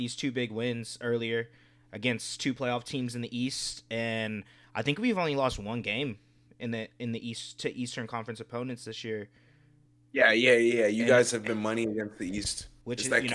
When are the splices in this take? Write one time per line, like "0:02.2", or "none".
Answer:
none